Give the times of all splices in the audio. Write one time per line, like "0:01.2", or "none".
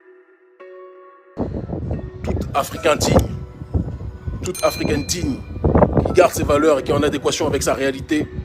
0:01.2